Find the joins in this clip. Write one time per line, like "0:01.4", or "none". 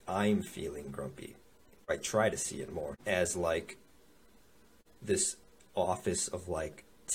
0:01.9
0:03.0